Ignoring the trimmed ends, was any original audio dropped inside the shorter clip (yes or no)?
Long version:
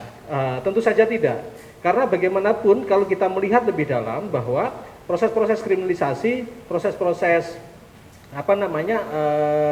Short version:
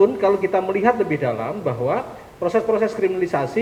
no